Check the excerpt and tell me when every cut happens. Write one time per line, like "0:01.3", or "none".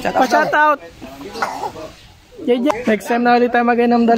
0:02.7